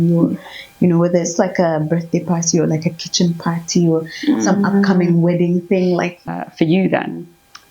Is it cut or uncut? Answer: cut